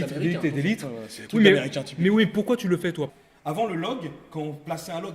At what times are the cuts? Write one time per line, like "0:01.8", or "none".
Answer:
0:03.2